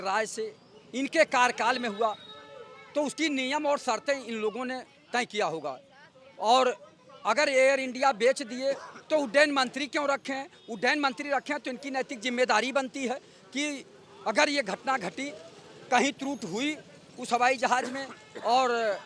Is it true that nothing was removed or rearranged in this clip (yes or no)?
yes